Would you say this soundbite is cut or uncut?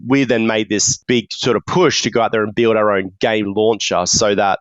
cut